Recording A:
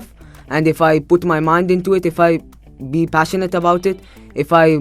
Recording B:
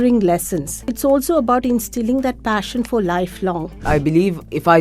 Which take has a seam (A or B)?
B